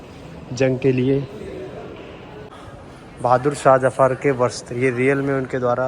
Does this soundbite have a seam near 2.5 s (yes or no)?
yes